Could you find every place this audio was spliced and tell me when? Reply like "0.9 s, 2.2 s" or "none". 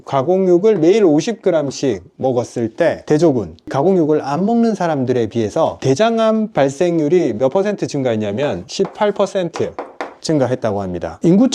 none